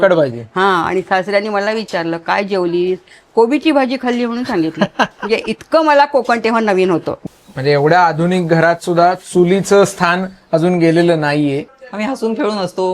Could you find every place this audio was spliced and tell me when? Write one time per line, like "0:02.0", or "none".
0:07.1
0:11.7